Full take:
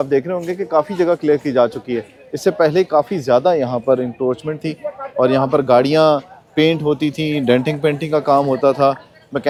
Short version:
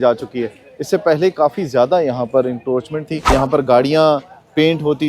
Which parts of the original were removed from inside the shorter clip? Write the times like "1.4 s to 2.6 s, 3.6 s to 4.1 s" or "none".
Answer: 4.8 s to 5.3 s